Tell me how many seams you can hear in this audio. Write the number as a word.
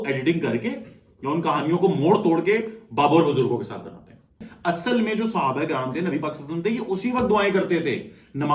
one